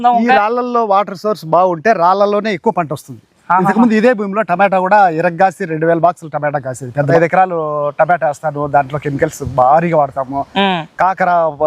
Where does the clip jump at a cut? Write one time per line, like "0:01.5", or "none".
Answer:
0:07.0